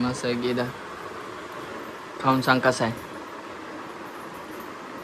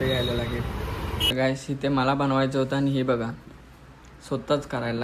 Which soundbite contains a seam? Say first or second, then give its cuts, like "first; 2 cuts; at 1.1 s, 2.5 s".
second; 1 cut; at 1.3 s